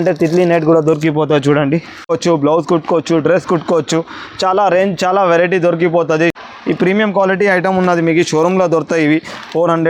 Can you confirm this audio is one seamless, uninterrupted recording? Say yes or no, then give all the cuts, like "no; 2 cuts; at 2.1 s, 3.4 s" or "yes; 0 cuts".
no; 2 cuts; at 2.1 s, 6.4 s